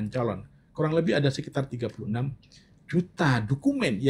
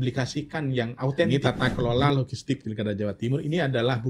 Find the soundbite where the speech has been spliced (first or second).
second